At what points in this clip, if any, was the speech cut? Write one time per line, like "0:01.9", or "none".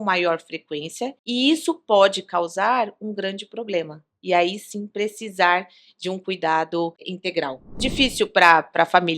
0:07.7

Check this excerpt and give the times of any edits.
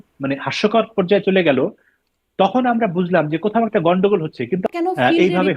0:04.6

